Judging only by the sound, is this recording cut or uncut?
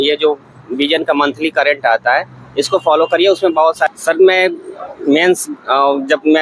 cut